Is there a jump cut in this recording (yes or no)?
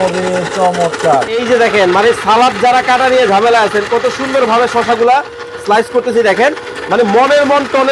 yes